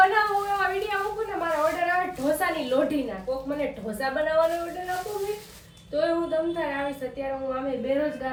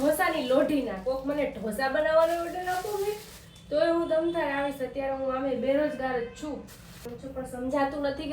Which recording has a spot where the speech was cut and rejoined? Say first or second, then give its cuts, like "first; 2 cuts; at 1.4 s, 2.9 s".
second; 1 cut; at 7.1 s